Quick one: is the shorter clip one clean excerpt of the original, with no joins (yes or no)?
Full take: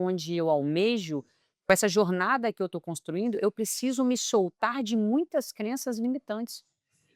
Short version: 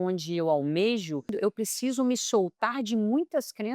no